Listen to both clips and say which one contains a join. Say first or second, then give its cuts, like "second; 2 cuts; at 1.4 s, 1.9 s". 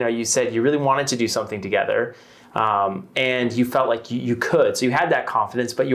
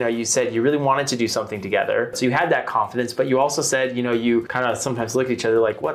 second; 2 cuts; at 2.2 s, 4.5 s